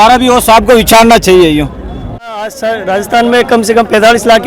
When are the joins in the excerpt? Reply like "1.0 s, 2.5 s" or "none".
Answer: 2.3 s